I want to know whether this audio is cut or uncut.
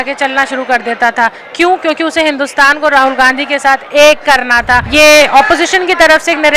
cut